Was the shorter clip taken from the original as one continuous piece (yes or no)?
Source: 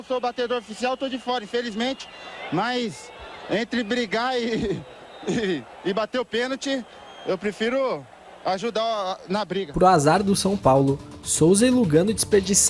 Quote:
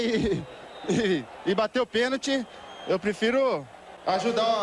yes